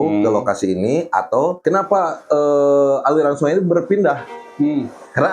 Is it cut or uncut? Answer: cut